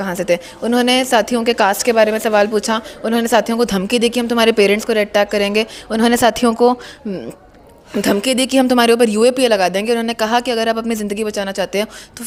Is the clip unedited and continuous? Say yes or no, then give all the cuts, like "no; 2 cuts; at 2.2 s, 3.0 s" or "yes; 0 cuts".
yes; 0 cuts